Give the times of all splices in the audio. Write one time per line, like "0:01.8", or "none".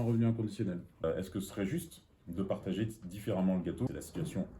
0:01.0
0:03.9